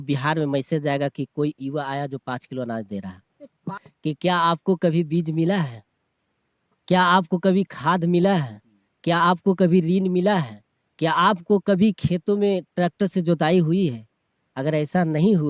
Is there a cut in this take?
yes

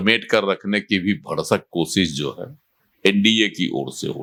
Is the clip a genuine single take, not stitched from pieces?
yes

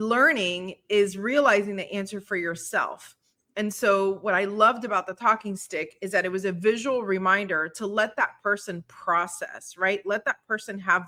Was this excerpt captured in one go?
yes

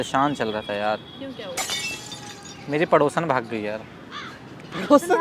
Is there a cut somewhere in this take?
yes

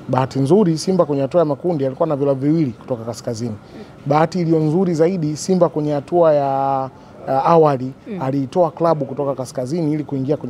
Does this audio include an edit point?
no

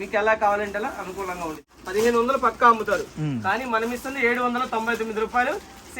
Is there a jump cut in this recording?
yes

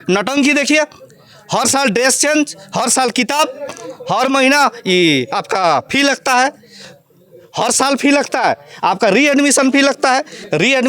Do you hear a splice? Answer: no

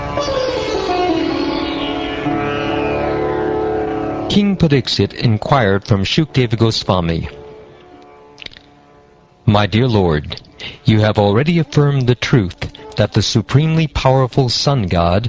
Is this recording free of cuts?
no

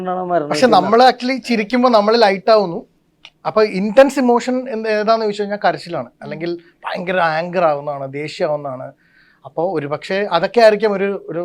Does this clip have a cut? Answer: no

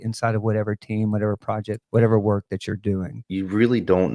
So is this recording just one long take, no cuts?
no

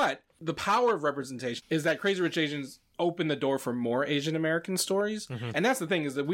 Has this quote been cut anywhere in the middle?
no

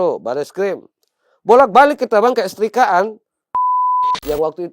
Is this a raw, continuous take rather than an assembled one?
no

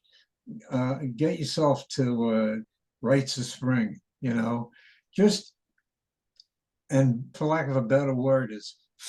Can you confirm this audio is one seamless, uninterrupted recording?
no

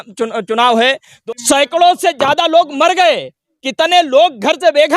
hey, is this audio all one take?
no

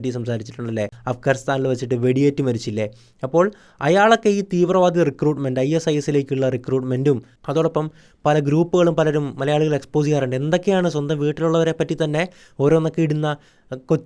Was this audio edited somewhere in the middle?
yes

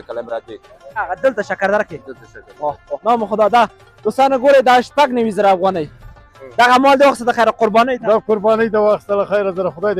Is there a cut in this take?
yes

